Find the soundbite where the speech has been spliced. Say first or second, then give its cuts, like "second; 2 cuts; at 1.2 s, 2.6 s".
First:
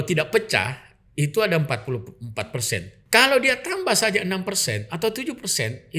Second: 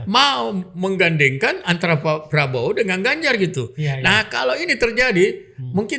first; 1 cut; at 2.9 s